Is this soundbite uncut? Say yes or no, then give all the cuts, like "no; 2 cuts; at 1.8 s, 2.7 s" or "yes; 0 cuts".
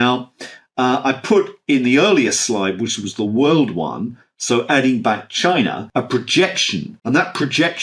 no; 2 cuts; at 5.8 s, 6.9 s